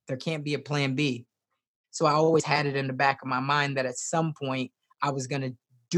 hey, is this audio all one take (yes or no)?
no